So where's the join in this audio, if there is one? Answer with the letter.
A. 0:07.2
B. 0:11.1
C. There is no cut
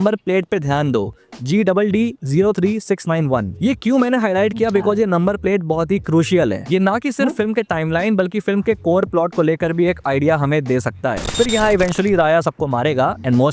B